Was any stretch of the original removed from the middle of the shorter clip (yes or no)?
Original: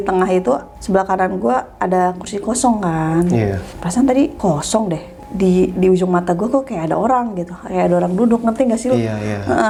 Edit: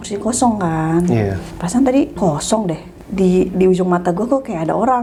no